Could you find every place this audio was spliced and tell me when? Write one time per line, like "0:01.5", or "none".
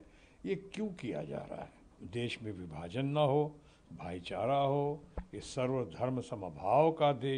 0:02.0